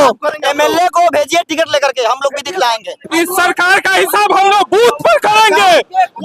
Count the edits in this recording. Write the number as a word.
one